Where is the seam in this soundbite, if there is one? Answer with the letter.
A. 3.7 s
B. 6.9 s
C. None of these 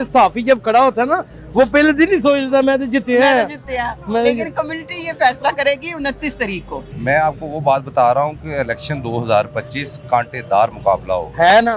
B